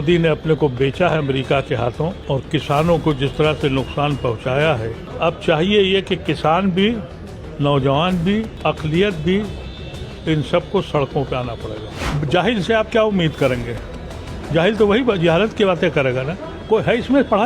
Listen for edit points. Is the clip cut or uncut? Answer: cut